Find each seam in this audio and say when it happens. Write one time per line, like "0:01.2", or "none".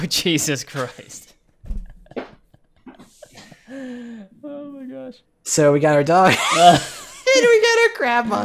0:05.1